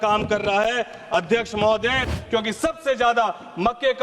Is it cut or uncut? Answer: cut